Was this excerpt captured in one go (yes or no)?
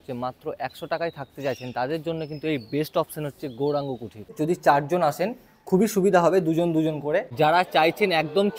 no